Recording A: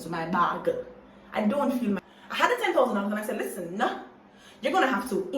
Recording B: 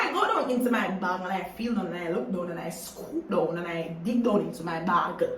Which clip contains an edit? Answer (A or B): A